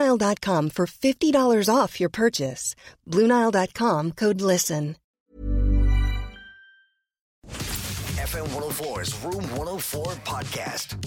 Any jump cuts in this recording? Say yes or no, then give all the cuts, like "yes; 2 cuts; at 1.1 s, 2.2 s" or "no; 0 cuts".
yes; 2 cuts; at 5.1 s, 7.5 s